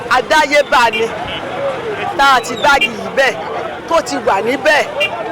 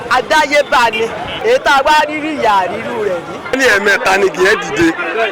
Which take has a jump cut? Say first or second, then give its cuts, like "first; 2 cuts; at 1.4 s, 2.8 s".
second; 2 cuts; at 1.3 s, 3.6 s